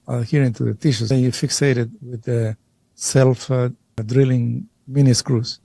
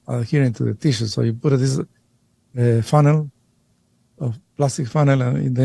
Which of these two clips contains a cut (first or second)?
first